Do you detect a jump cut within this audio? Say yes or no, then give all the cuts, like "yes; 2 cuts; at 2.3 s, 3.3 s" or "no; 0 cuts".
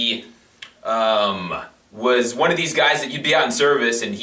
no; 0 cuts